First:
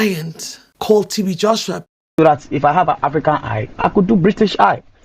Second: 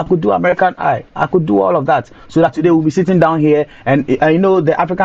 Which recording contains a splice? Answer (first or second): first